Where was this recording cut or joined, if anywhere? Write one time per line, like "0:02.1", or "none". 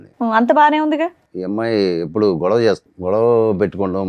0:01.3
0:02.9